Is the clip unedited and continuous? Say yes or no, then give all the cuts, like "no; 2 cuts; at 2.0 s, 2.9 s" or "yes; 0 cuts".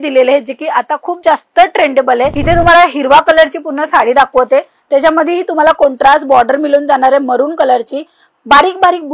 no; 1 cut; at 2.4 s